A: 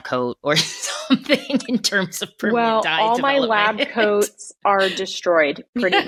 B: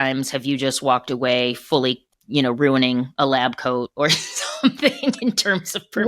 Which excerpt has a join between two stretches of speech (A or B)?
B